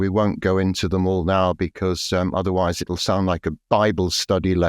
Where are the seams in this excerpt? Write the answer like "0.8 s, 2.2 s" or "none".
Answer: none